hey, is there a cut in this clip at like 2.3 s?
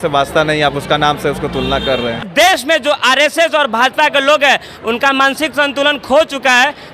yes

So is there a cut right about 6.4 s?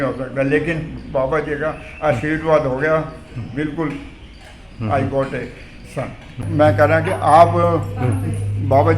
yes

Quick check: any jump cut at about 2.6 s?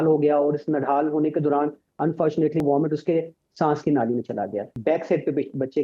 yes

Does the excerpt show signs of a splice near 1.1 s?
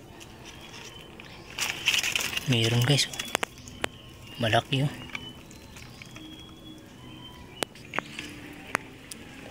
no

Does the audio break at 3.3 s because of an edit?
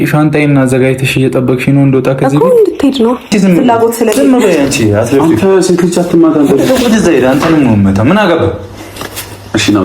yes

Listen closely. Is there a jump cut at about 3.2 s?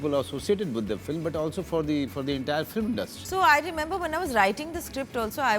yes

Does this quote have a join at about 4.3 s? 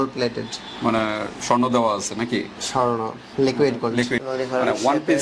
yes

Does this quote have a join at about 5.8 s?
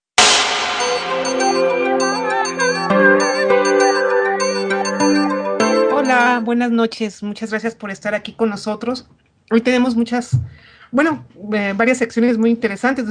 yes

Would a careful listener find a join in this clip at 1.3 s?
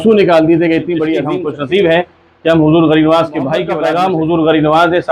yes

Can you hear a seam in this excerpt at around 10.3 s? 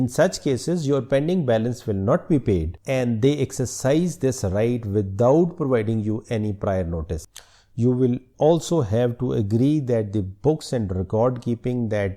no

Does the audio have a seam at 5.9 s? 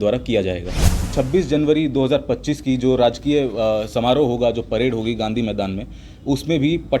no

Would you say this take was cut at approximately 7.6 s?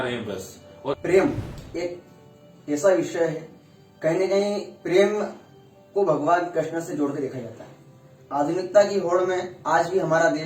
no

